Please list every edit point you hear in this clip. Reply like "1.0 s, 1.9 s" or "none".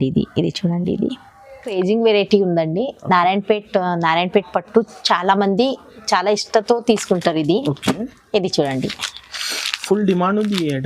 1.7 s